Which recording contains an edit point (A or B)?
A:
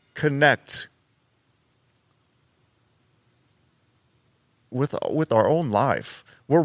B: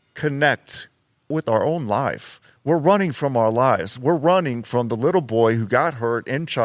B